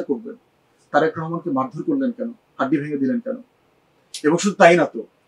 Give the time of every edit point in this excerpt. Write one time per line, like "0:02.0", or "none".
none

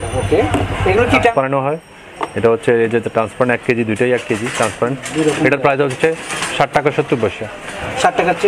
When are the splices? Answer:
0:01.3

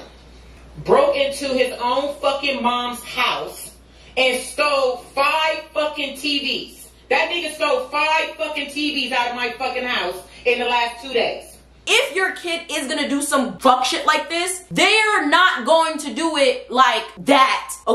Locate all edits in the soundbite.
0:11.8

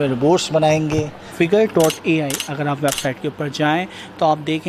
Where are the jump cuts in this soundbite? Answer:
0:01.2

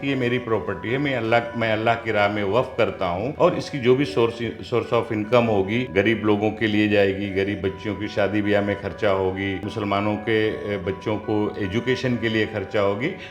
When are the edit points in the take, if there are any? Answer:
0:03.3
0:05.9
0:09.7

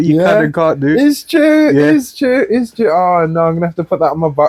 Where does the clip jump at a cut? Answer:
none

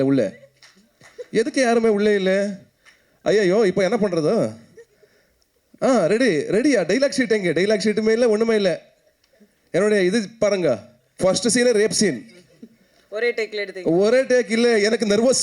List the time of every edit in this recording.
none

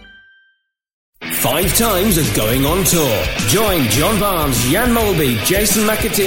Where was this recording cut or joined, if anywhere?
0:01.0

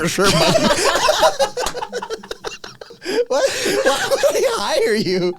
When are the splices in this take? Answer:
0:03.0

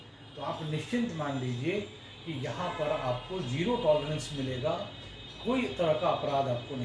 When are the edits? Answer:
none

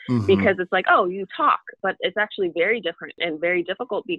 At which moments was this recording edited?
0:01.7
0:03.2

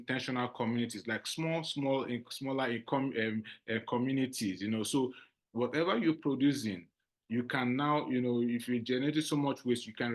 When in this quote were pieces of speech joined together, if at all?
none

